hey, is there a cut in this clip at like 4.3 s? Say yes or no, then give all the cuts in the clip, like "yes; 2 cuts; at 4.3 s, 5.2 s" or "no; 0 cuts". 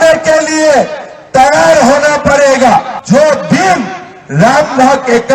no; 1 cut; at 3.0 s